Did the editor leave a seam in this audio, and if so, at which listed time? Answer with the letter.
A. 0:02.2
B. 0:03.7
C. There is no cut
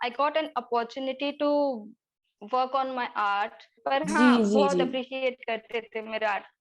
B